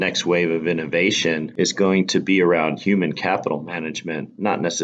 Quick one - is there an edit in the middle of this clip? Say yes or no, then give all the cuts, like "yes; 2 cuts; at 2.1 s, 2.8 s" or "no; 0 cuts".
yes; 1 cut; at 1.5 s